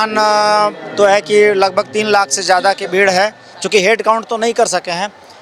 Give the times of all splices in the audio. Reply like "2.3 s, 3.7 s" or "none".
none